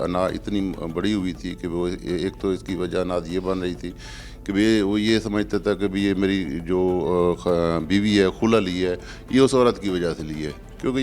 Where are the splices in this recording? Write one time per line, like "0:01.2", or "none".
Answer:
none